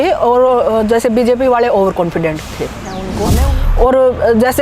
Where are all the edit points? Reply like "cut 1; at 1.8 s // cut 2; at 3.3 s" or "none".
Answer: cut 1; at 3.1 s